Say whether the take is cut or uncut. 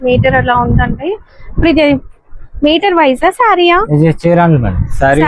uncut